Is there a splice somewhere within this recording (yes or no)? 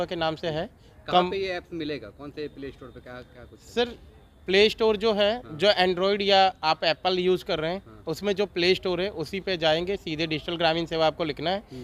no